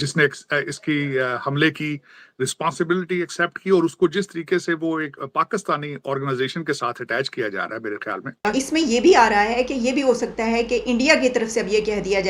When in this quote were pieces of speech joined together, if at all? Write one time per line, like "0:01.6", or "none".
0:08.4